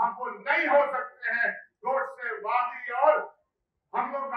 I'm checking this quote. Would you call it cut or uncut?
uncut